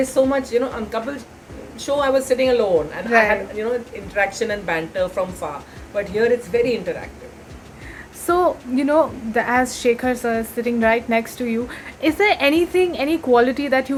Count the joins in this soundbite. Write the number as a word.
zero